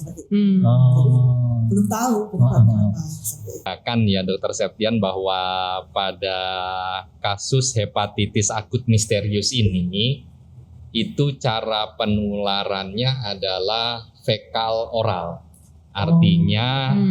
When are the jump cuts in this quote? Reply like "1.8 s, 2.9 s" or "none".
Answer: 3.7 s